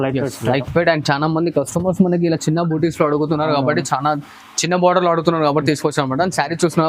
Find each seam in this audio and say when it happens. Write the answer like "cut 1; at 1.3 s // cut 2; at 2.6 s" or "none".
none